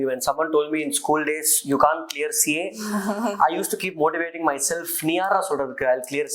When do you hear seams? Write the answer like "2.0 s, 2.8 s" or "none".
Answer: none